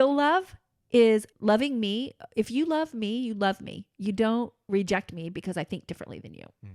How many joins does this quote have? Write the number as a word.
one